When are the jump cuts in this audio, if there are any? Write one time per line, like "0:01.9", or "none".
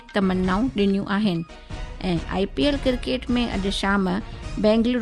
none